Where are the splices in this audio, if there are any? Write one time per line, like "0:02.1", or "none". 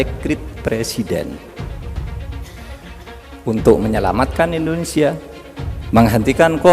0:01.5
0:03.1